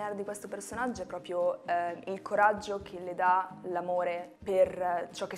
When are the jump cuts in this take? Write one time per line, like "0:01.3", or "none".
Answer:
none